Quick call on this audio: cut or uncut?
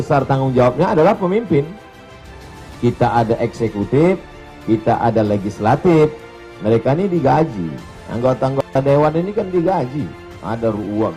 uncut